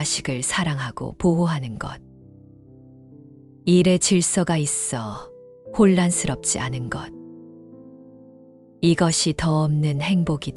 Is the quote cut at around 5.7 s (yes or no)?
no